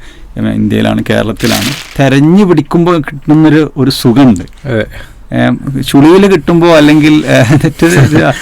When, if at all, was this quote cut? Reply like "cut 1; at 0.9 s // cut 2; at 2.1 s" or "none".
cut 1; at 1.8 s